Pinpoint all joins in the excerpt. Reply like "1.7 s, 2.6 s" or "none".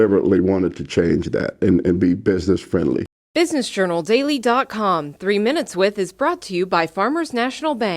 3.2 s